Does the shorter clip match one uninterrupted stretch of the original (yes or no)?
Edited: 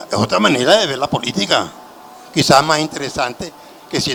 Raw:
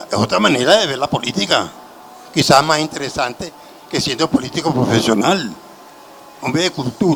yes